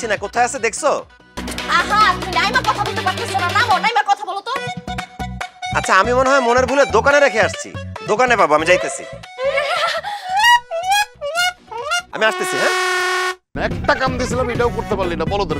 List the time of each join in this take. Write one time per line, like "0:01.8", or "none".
0:01.3
0:13.5